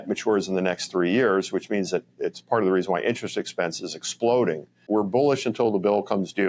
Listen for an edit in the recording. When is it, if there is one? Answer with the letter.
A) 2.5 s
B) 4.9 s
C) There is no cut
B